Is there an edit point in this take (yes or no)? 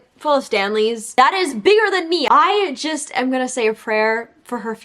yes